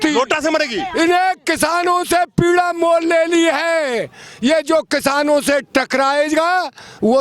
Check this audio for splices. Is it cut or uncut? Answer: uncut